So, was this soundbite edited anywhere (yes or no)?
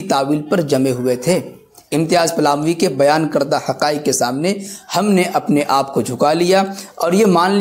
no